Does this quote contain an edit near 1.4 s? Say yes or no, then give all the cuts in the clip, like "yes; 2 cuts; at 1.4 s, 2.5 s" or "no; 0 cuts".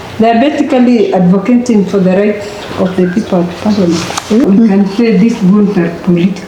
no; 1 cut; at 4.5 s